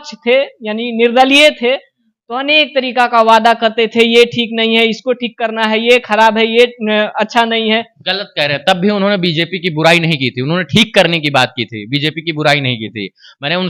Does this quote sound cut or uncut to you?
uncut